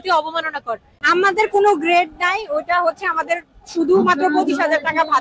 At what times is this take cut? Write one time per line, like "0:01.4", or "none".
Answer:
0:00.9